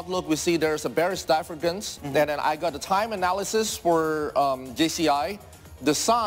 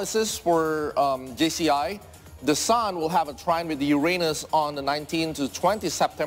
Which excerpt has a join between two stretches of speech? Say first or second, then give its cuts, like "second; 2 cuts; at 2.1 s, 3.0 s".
first; 1 cut; at 1.9 s